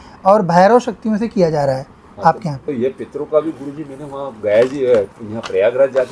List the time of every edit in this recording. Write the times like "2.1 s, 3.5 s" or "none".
2.7 s